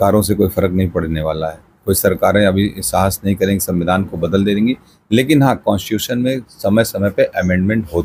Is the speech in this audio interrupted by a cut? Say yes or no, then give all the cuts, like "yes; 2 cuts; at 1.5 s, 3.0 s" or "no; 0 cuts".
no; 0 cuts